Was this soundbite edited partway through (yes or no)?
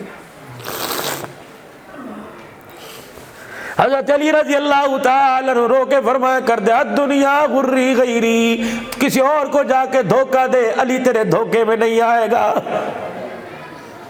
no